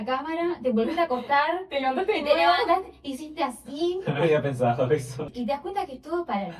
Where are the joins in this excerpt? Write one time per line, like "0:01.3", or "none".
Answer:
0:05.3